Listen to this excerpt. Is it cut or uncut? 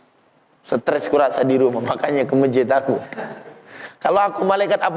uncut